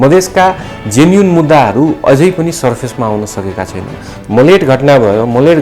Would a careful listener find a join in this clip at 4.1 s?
yes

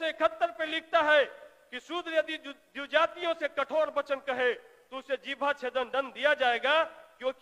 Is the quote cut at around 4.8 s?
no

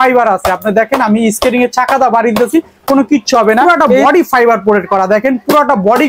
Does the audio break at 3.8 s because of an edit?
yes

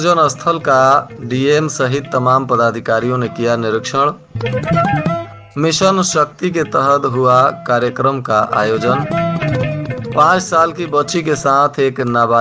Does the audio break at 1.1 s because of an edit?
no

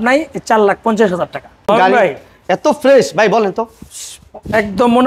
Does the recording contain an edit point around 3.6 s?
no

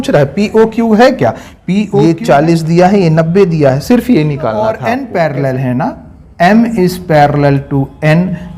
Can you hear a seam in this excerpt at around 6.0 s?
no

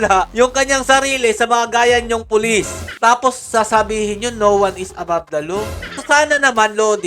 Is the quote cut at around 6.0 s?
yes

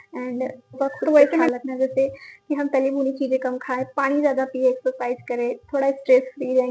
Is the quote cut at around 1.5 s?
yes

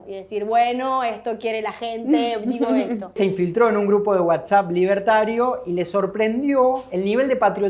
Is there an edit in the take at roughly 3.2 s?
yes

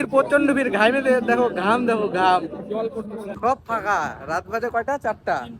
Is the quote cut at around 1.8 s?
no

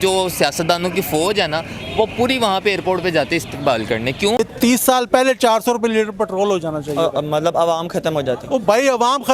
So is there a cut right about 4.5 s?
yes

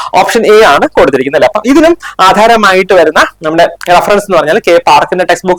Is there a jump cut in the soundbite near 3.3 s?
no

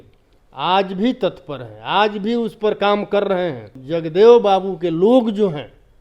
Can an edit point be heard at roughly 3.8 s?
yes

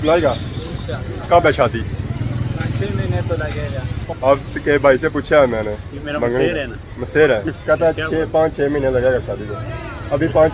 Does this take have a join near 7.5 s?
yes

